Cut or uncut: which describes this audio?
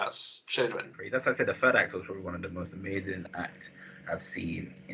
cut